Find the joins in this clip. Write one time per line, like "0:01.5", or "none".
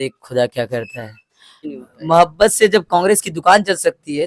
0:01.6